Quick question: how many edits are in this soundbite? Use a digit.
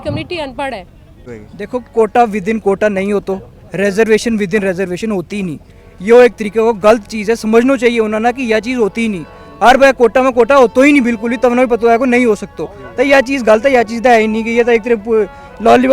1